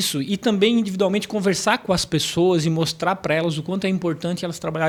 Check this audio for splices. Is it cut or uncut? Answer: uncut